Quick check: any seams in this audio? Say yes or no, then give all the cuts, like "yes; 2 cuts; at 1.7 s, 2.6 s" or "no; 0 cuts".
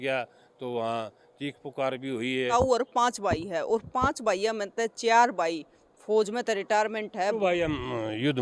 yes; 2 cuts; at 2.3 s, 7.4 s